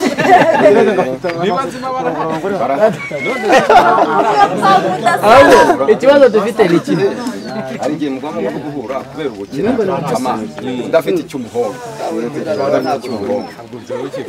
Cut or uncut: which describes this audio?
uncut